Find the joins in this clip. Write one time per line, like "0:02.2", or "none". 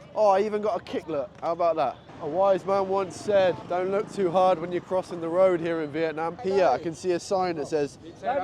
0:02.1
0:03.6
0:06.4